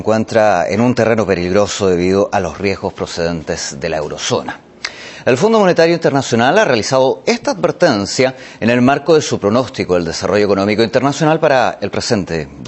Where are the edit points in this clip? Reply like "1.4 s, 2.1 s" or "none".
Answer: none